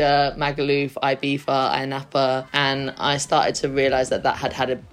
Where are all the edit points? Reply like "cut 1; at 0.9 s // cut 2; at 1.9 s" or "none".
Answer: cut 1; at 2.5 s